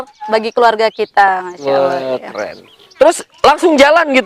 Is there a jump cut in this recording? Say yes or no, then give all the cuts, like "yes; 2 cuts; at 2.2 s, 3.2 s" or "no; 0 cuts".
yes; 1 cut; at 2.8 s